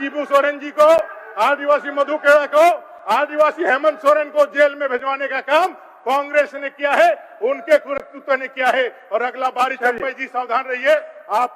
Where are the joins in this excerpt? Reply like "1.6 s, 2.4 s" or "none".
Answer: none